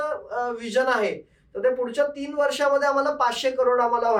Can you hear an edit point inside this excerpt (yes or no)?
no